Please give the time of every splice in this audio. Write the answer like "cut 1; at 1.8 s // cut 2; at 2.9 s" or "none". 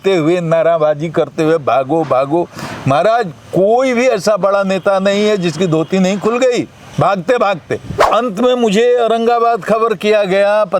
cut 1; at 8.0 s

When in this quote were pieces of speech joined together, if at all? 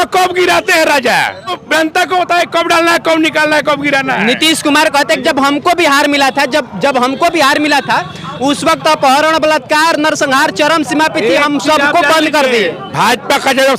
none

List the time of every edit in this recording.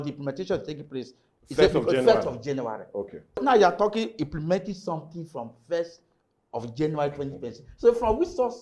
cut 1; at 3.4 s

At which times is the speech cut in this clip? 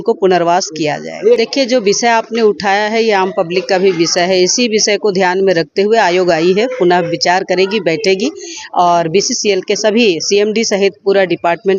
none

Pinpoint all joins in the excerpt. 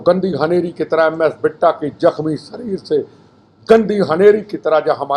none

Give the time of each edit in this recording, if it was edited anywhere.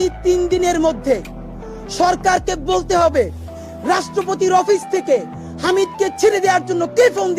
none

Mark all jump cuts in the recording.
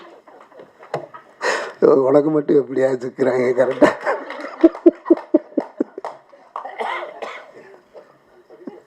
none

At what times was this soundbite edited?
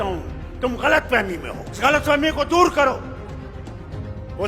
cut 1; at 1.8 s

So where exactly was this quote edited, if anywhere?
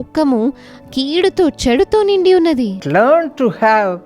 cut 1; at 2.7 s

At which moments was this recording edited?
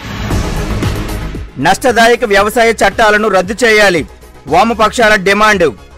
cut 1; at 1.4 s

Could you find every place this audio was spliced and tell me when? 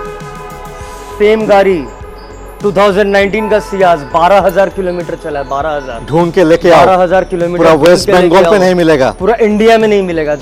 none

